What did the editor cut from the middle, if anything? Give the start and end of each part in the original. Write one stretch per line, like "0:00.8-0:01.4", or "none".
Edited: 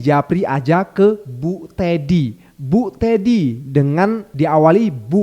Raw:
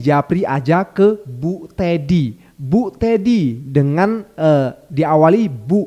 0:04.3-0:04.8